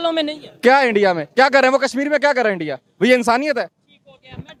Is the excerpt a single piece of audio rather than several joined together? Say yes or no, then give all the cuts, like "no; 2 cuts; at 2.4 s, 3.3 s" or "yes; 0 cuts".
yes; 0 cuts